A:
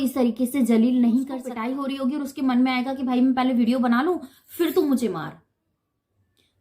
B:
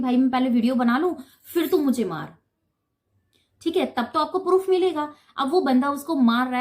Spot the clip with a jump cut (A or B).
A